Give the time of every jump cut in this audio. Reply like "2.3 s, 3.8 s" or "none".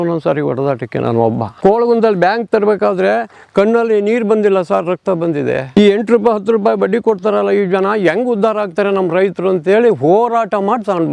1.5 s, 5.7 s